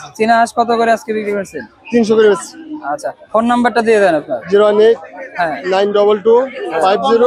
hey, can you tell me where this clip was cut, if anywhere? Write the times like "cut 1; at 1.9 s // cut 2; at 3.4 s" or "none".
none